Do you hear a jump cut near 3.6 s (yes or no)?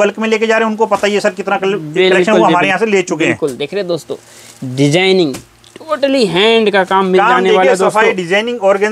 no